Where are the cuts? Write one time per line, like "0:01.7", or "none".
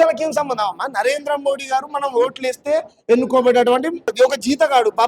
0:04.1